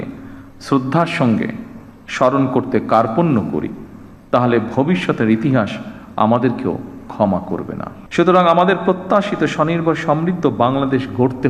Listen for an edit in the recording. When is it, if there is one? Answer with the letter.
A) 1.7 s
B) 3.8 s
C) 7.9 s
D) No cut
C